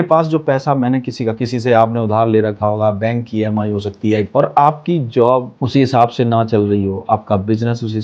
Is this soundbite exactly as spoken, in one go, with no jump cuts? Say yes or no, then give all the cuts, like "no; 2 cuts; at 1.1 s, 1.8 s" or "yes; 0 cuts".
no; 2 cuts; at 4.3 s, 5.6 s